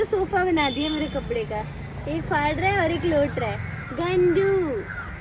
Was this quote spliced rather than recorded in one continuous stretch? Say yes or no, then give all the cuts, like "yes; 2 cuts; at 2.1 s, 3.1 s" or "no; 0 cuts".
no; 0 cuts